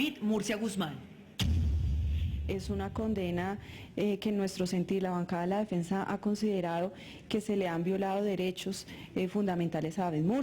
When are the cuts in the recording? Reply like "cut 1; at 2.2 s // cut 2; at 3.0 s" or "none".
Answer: cut 1; at 2.0 s